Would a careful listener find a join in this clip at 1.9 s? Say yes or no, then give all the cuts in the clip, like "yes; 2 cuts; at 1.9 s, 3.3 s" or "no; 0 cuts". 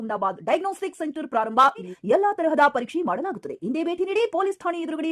yes; 1 cut; at 1.9 s